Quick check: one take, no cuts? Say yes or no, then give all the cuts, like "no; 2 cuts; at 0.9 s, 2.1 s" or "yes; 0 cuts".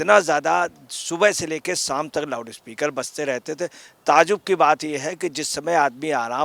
yes; 0 cuts